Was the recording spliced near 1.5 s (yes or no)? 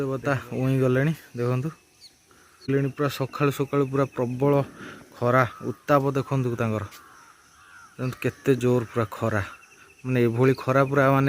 no